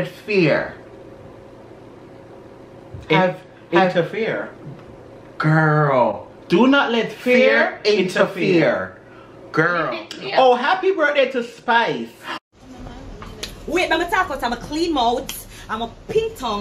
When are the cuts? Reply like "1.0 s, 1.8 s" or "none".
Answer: 10.0 s